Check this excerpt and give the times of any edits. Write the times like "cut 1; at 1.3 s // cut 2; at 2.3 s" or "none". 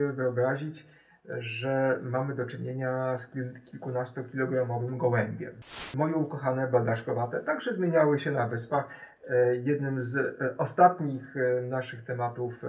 cut 1; at 5.9 s